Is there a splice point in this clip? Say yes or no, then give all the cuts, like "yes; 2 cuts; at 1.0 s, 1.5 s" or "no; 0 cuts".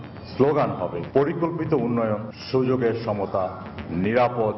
yes; 2 cuts; at 1.0 s, 2.3 s